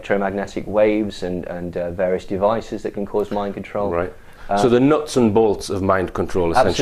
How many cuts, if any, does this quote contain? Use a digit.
0